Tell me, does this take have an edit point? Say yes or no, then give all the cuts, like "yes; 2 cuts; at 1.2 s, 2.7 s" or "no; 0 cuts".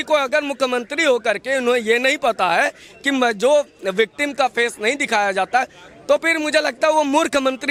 no; 0 cuts